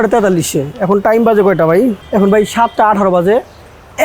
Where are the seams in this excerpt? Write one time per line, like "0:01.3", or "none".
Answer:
0:02.0